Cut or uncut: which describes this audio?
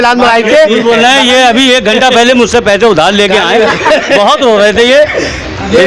uncut